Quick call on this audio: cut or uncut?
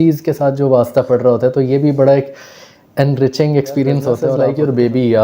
cut